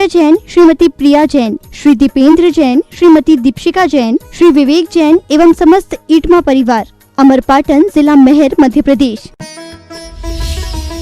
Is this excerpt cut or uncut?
cut